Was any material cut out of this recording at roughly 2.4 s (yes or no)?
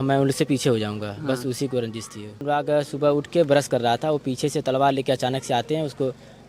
yes